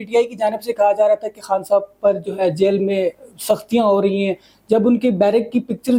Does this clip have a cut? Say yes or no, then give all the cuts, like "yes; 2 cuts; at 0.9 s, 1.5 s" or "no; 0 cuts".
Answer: no; 0 cuts